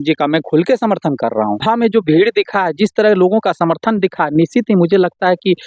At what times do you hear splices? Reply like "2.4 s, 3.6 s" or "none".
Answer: 1.6 s